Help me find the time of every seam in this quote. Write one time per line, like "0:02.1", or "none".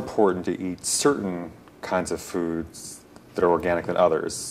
none